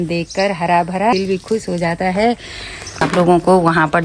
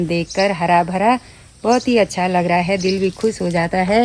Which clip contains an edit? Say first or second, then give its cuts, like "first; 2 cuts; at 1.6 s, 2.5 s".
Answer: first; 2 cuts; at 1.1 s, 3.0 s